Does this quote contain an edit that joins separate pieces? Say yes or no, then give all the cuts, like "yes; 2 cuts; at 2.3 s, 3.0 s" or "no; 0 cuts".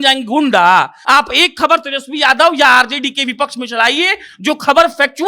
yes; 1 cut; at 1.0 s